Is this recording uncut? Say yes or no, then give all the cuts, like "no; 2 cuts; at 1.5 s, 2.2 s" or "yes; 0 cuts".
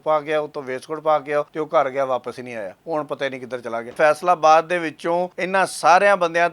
no; 4 cuts; at 1.5 s, 2.8 s, 3.9 s, 5.4 s